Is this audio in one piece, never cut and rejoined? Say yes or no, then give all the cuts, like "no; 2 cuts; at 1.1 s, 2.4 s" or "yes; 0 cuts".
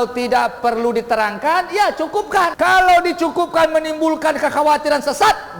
no; 1 cut; at 2.5 s